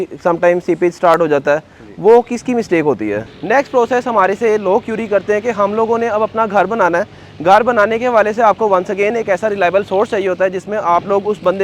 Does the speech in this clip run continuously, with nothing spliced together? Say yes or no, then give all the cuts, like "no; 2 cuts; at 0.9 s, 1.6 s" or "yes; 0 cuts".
no; 1 cut; at 3.2 s